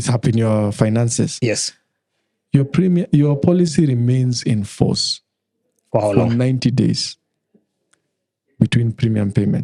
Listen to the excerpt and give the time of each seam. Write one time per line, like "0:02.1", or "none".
none